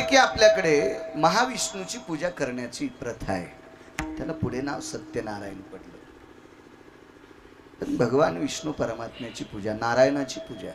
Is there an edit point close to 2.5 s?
no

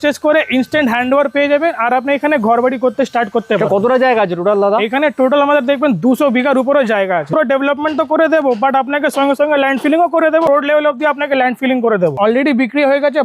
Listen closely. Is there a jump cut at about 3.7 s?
no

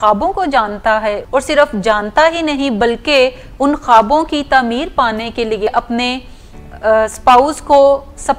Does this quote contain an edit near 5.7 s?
yes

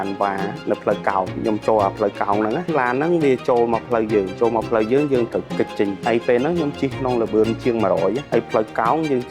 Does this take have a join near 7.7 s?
no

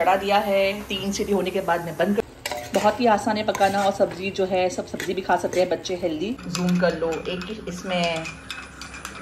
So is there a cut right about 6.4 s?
yes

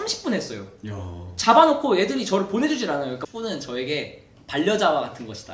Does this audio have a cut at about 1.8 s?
no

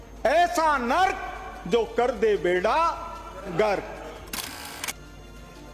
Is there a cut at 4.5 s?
yes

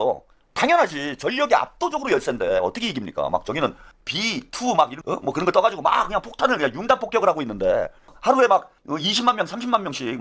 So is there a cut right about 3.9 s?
yes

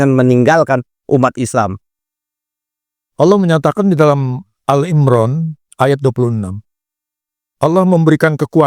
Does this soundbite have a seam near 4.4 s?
no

